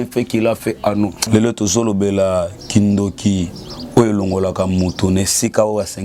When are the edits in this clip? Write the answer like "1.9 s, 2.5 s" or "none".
1.2 s